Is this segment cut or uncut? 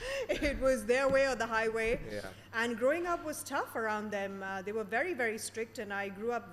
uncut